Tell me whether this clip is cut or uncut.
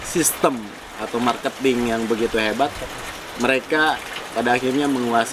uncut